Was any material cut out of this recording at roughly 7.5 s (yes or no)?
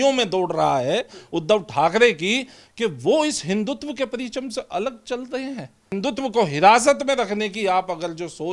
no